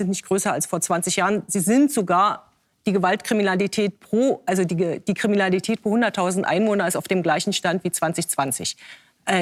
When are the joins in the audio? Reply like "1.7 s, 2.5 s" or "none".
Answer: none

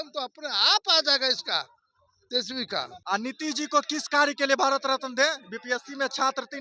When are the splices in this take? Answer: 2.9 s

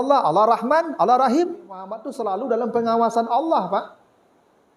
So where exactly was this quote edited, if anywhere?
2.1 s

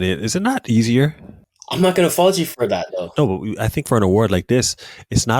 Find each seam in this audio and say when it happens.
1.6 s

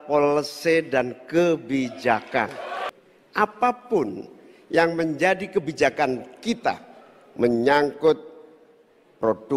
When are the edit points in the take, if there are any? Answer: 2.7 s

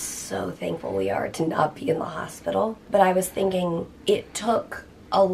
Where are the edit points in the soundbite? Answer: 2.8 s, 3.9 s

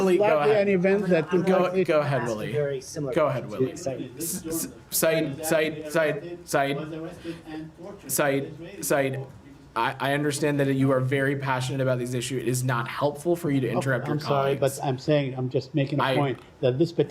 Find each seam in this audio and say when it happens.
3.9 s

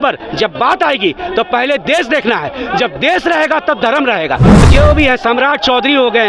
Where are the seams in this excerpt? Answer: 4.5 s

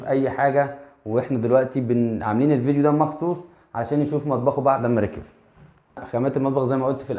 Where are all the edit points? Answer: 6.0 s

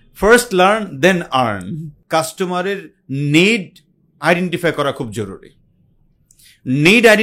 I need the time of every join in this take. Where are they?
1.9 s

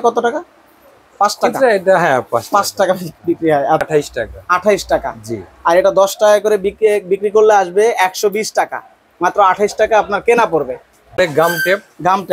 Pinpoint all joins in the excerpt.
3.8 s, 11.2 s

